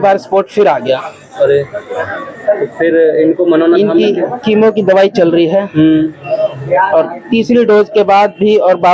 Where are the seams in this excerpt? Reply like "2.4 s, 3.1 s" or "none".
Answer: none